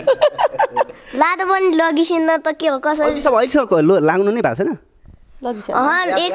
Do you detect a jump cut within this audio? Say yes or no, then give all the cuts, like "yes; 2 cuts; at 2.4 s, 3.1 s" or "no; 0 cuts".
no; 0 cuts